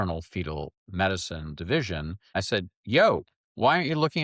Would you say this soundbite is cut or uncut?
cut